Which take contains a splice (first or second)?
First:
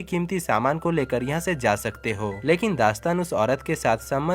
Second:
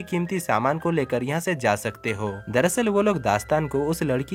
first